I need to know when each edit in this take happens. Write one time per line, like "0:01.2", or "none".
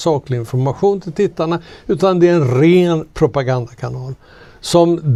none

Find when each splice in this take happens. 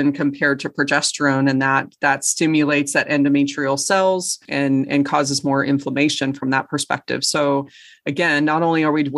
0:04.4

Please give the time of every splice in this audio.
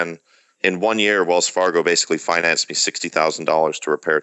none

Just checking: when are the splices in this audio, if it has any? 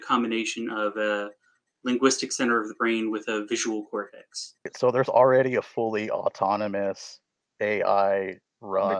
0:04.7

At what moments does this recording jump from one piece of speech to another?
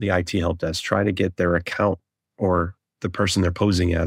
none

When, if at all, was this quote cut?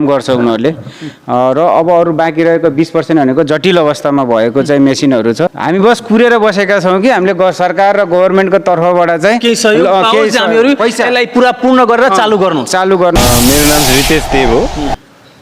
0:05.6
0:13.2

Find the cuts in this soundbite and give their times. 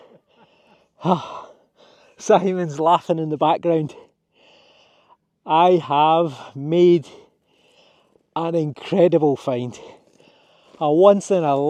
none

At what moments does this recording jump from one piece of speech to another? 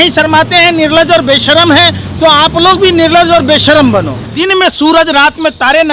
0:04.2

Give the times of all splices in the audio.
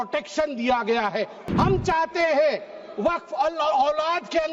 0:01.4

